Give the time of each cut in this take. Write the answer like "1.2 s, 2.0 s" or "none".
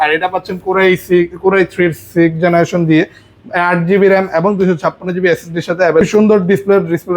6.0 s